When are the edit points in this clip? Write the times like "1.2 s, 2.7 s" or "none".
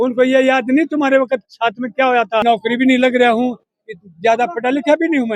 2.4 s